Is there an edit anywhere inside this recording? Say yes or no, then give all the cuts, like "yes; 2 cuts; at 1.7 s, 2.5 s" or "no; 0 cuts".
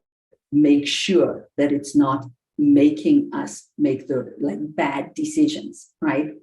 yes; 1 cut; at 4.3 s